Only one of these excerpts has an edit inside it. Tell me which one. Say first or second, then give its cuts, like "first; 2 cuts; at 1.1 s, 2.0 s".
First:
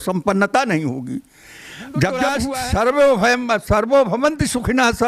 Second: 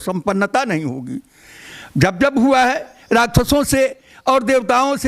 first; 1 cut; at 2.5 s